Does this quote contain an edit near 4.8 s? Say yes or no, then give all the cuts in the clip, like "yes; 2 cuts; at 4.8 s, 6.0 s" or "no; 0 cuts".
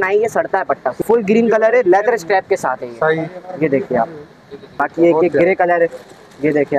yes; 2 cuts; at 1.0 s, 4.8 s